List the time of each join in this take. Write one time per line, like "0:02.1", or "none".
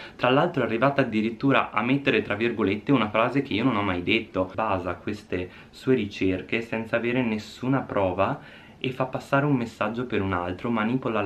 0:04.5